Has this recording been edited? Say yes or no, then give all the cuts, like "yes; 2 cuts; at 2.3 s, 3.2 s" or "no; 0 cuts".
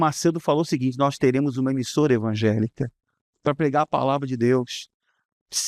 no; 0 cuts